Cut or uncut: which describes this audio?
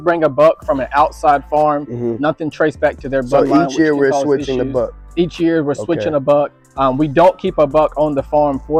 uncut